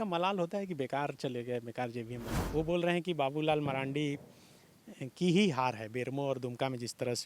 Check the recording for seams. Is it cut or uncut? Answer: cut